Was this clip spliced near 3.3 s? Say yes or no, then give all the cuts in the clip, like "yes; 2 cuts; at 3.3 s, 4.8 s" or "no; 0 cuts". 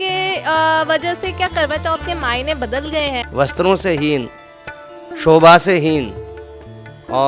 yes; 1 cut; at 3.3 s